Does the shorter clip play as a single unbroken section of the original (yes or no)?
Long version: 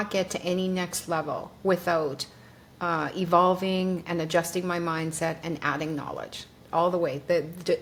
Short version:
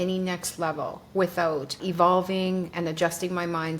no